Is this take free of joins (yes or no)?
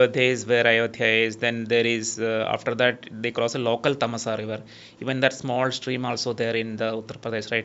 yes